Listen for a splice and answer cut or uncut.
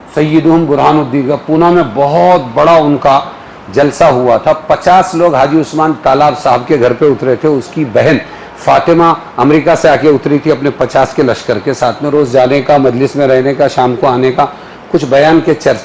uncut